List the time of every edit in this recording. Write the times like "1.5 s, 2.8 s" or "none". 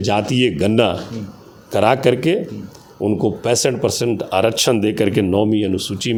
none